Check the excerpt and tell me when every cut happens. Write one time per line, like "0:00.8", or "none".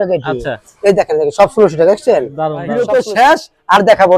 0:02.6

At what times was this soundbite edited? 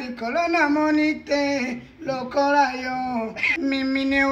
0:03.4

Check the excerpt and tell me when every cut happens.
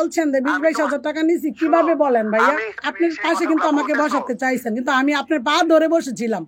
0:02.8

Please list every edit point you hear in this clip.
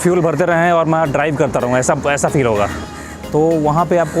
0:02.9

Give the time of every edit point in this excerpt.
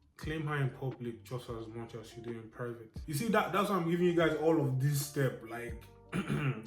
0:03.0

